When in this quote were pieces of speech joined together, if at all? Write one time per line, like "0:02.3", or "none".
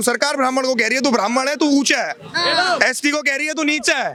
none